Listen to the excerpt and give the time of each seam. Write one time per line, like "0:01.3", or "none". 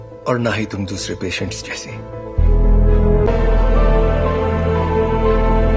0:03.3